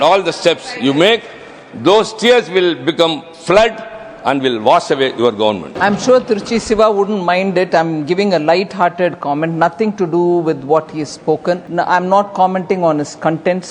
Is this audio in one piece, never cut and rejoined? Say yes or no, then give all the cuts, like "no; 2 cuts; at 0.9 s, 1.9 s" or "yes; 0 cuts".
no; 2 cuts; at 5.7 s, 11.7 s